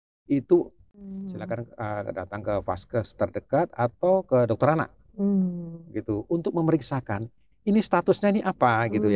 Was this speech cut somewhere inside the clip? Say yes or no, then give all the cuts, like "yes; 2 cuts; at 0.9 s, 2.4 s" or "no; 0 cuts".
yes; 1 cut; at 1.3 s